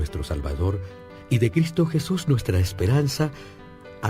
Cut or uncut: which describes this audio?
uncut